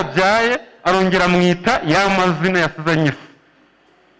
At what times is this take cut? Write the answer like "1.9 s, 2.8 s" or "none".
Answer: none